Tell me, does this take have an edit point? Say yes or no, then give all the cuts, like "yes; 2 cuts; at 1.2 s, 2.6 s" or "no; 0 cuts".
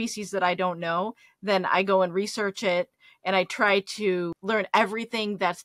yes; 1 cut; at 4.4 s